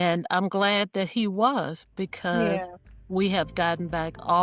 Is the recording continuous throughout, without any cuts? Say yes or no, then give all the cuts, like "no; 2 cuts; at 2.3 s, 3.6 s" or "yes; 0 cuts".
yes; 0 cuts